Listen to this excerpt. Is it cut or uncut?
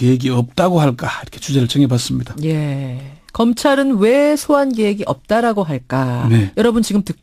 uncut